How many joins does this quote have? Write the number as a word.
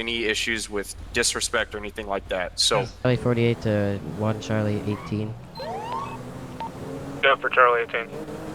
one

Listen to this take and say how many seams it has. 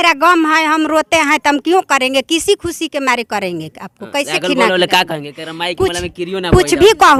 zero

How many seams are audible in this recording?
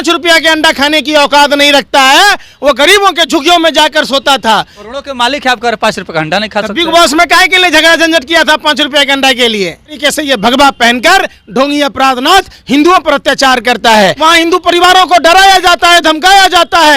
three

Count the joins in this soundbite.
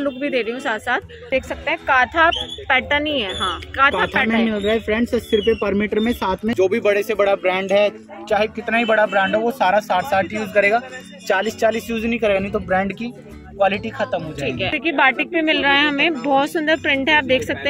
three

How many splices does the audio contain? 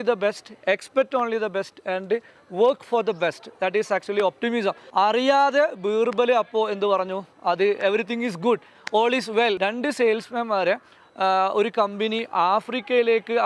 two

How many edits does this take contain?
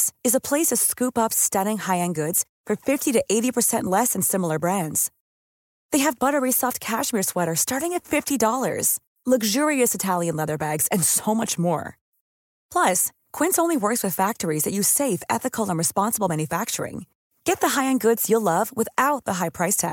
zero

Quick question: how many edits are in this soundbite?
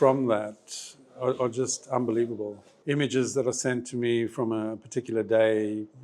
one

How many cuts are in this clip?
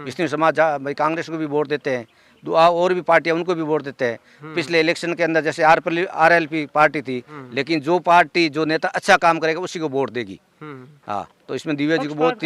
one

